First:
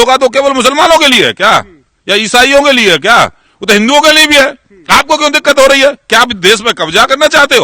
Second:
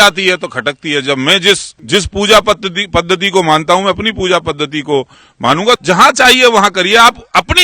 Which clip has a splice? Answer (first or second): second